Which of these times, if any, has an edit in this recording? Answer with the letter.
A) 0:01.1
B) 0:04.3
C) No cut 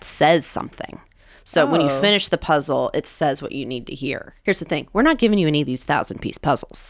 B